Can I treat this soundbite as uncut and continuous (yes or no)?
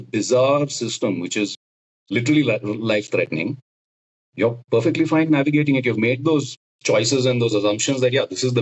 yes